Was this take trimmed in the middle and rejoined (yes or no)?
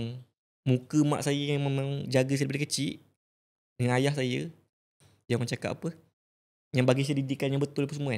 no